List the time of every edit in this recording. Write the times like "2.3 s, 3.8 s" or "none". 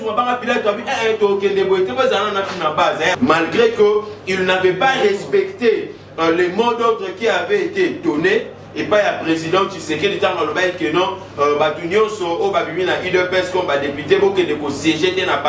3.2 s